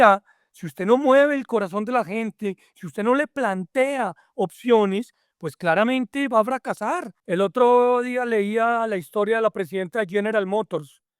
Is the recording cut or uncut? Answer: cut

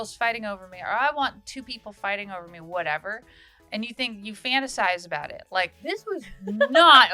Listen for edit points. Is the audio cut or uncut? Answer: cut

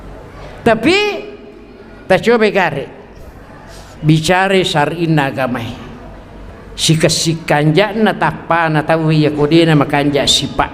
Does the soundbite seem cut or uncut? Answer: uncut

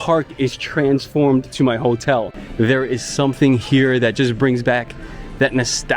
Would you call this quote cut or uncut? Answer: cut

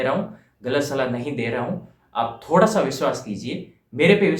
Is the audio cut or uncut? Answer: uncut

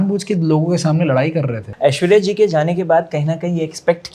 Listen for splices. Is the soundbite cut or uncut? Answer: cut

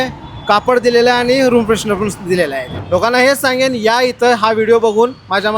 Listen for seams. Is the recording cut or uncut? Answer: cut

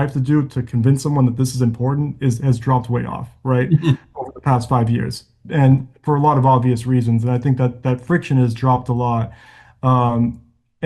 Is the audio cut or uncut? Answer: uncut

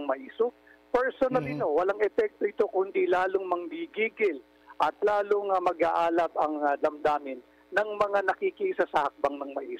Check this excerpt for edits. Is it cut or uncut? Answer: uncut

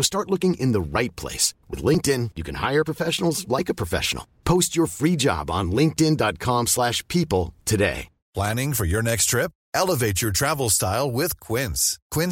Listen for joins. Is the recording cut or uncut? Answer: cut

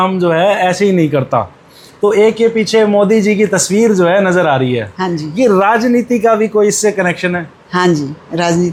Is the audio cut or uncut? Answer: uncut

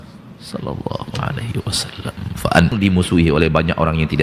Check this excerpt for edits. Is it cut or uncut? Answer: cut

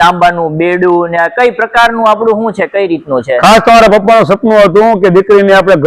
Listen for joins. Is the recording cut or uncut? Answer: uncut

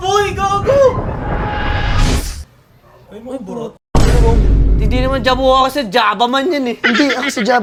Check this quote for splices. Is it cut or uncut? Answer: uncut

